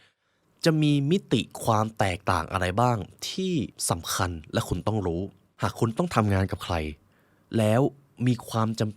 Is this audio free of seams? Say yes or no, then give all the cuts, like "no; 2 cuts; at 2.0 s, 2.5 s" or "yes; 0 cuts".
no; 2 cuts; at 3.8 s, 5.4 s